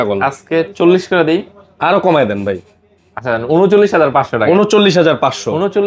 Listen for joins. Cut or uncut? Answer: uncut